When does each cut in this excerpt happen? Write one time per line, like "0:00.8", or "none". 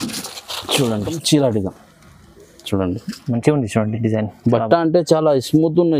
0:01.2